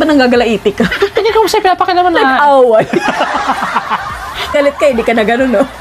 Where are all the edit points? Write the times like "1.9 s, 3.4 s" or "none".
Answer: 4.6 s